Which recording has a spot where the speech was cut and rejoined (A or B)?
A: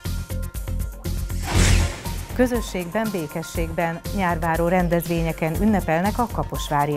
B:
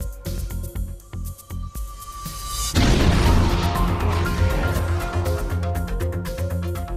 A